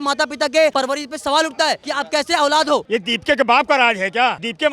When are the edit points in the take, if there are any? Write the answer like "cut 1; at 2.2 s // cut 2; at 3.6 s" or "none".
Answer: cut 1; at 2.9 s